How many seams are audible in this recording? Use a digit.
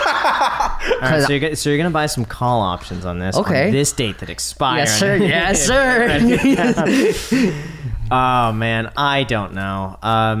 0